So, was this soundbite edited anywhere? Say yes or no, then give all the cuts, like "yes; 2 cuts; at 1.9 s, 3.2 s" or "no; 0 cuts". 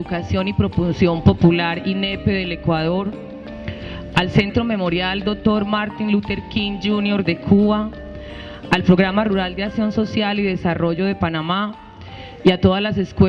no; 0 cuts